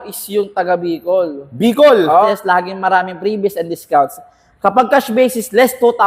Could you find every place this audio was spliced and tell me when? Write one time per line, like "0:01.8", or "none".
0:02.3